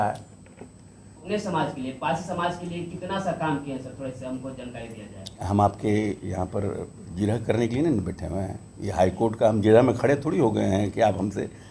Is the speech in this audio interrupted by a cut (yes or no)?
yes